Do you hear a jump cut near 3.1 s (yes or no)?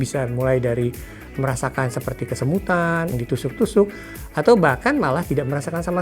yes